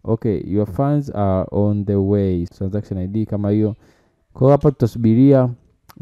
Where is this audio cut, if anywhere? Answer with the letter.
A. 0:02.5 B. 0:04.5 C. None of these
A